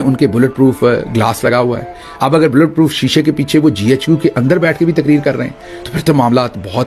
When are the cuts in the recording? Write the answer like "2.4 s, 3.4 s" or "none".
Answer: none